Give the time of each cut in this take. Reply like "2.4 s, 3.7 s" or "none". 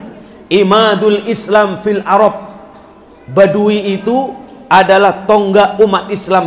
none